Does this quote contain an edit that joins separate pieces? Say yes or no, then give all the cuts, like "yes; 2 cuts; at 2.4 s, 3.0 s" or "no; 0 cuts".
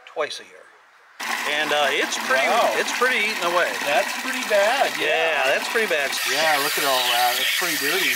yes; 2 cuts; at 1.2 s, 6.1 s